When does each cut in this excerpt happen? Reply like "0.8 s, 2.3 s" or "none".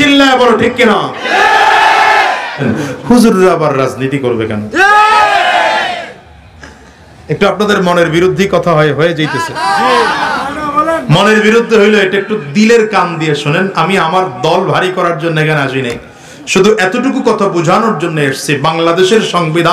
2.6 s